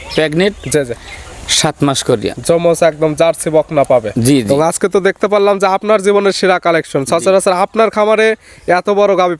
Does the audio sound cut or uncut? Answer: uncut